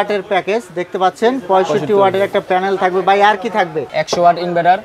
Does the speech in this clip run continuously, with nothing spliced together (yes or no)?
no